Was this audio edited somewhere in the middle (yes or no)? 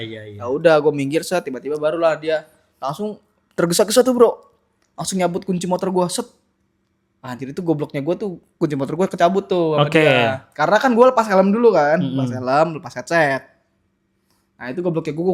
no